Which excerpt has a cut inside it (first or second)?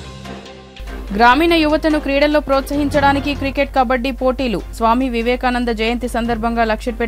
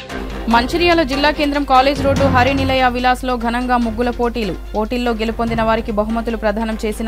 first